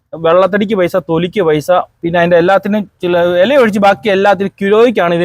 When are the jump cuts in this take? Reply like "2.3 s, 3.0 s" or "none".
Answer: none